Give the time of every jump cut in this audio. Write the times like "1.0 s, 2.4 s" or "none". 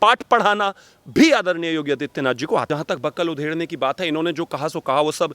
2.7 s